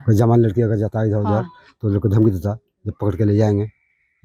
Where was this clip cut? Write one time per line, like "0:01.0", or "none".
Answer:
none